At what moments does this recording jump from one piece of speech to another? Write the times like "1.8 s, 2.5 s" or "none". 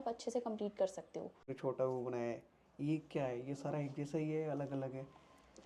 1.5 s